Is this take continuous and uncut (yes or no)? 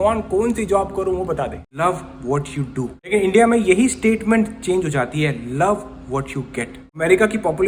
no